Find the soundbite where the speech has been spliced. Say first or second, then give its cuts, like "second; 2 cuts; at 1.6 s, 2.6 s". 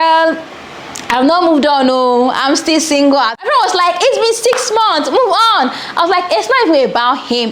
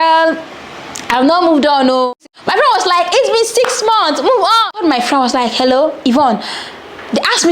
second; 2 cuts; at 2.4 s, 4.7 s